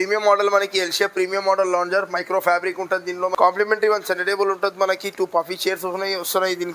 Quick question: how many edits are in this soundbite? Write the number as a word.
one